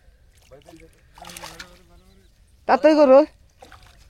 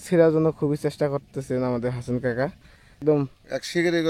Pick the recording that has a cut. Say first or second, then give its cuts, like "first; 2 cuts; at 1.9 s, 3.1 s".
second; 1 cut; at 3.0 s